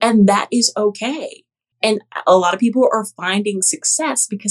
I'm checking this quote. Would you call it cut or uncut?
uncut